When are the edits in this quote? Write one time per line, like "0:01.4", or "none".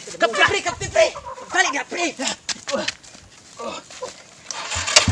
none